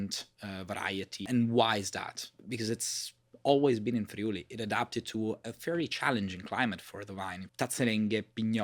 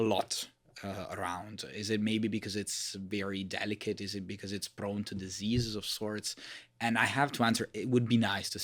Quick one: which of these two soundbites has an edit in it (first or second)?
first